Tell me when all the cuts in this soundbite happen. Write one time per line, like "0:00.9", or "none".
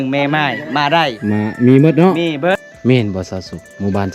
0:02.7